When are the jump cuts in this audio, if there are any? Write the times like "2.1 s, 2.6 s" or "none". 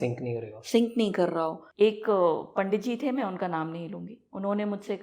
1.6 s

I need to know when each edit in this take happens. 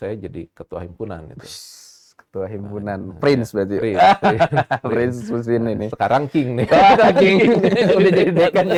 none

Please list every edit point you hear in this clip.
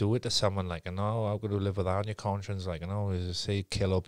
none

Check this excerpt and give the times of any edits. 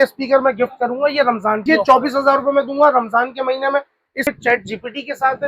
1.4 s, 4.3 s

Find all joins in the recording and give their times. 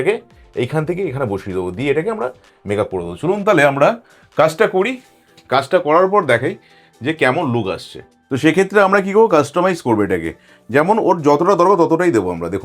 none

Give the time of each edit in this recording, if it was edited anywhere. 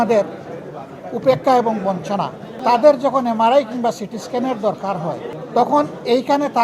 2.6 s, 5.3 s

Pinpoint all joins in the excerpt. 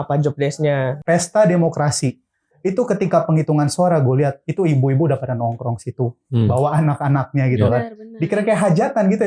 0.9 s

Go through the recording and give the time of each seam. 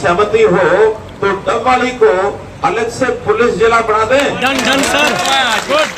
none

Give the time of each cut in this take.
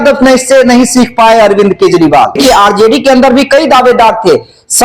2.4 s

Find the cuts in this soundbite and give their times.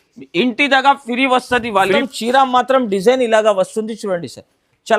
2.0 s

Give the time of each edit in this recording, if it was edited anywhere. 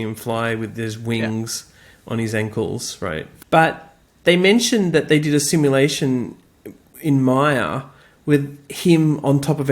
3.3 s

